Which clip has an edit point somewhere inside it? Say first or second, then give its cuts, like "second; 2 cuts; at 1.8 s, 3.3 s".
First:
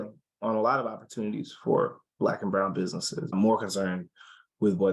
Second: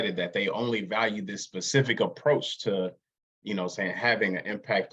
first; 1 cut; at 3.3 s